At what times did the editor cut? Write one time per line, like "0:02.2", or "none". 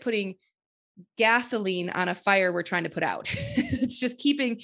none